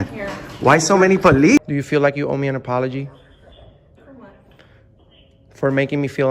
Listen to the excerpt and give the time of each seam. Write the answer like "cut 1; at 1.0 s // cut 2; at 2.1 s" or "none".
cut 1; at 1.6 s